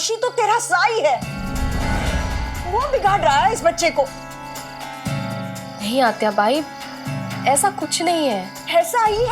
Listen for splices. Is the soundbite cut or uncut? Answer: cut